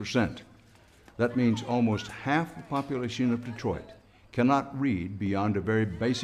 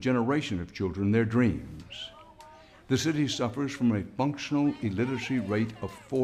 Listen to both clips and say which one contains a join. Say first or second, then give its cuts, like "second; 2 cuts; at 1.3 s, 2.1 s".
second; 1 cut; at 5.2 s